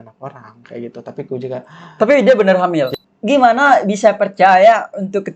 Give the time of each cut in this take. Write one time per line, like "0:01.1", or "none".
0:02.9